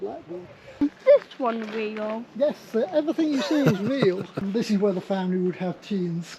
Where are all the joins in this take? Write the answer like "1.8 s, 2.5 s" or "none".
0.8 s, 4.4 s